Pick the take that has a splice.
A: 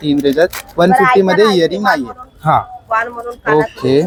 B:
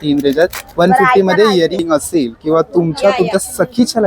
B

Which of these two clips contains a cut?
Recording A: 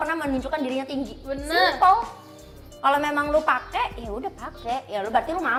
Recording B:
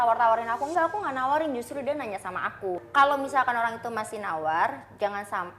B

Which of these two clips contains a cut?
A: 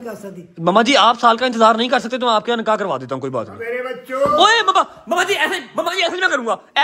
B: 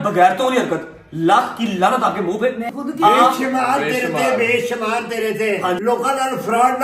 B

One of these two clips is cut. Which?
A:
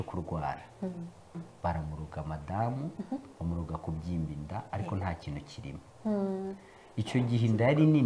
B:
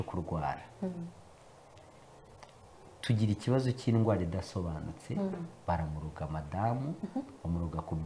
A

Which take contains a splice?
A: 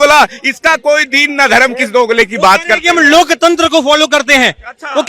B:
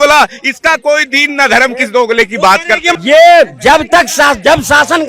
B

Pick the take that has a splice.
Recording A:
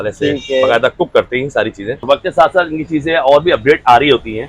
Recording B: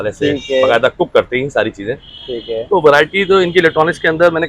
A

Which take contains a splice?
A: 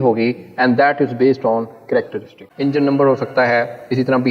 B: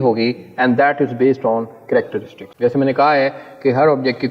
A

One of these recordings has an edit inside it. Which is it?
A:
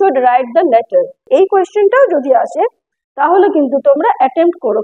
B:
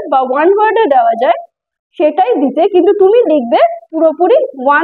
A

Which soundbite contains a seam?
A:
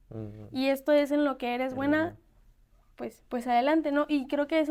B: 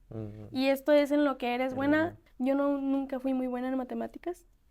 B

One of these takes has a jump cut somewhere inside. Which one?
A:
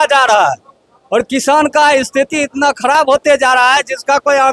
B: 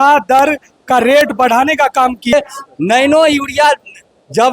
B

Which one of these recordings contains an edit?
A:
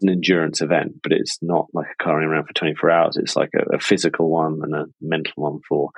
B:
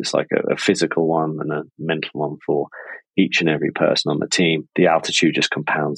B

